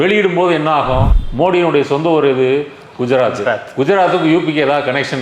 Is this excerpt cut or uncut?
cut